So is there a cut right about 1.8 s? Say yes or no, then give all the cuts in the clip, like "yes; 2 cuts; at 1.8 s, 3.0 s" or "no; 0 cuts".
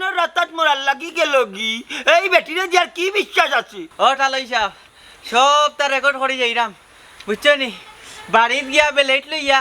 no; 1 cut; at 3.8 s